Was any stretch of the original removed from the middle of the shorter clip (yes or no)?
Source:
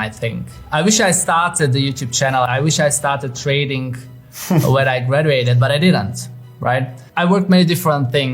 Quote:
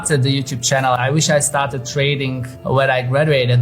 yes